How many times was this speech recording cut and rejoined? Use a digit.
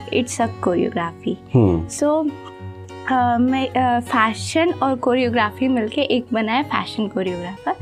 0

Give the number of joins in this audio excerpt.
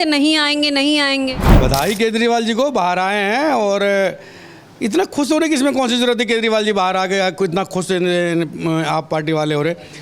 1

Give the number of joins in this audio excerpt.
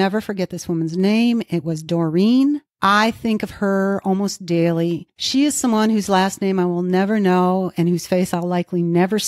2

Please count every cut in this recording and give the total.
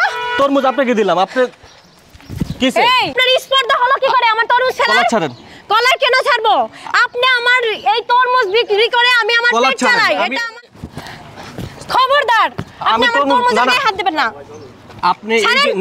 1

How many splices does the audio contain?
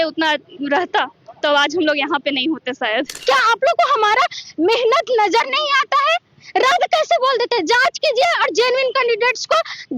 1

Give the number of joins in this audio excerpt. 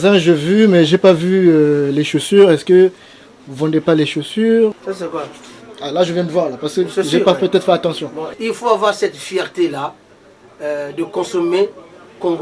2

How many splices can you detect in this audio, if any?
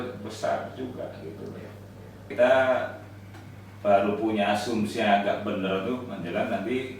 1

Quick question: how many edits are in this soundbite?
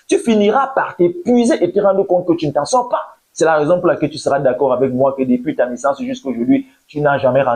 1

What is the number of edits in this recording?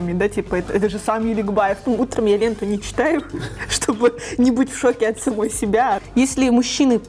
2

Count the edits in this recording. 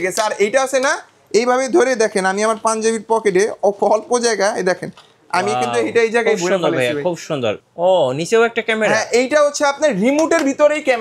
1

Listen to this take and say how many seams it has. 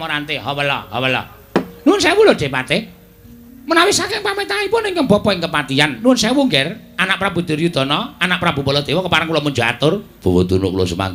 0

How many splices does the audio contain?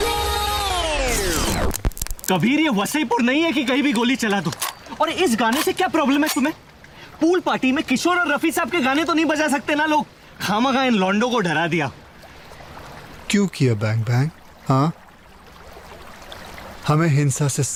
0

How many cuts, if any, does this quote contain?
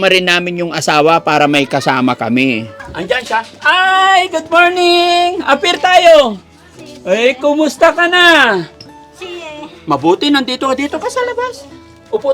1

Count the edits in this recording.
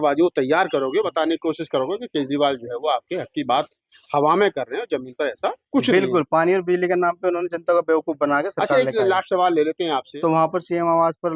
1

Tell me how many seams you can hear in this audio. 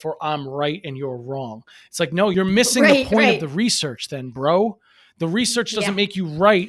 1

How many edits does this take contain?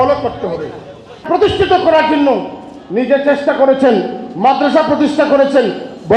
1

